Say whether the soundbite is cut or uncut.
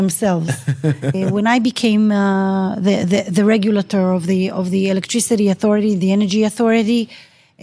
cut